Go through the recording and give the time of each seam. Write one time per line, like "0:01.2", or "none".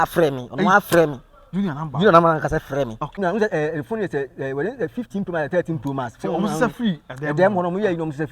0:03.2